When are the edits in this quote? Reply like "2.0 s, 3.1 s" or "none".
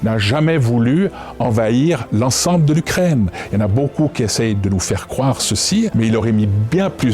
5.9 s